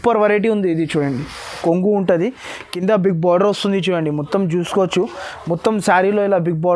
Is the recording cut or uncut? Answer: cut